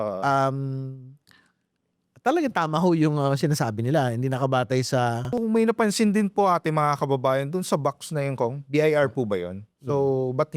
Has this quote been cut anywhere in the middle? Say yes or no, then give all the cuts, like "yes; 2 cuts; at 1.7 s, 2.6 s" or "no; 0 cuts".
yes; 1 cut; at 5.4 s